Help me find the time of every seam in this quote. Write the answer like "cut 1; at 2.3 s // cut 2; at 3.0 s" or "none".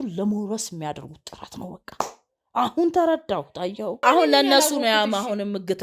cut 1; at 4.0 s